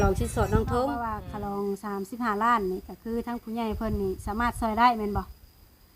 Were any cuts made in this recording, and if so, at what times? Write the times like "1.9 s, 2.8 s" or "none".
1.2 s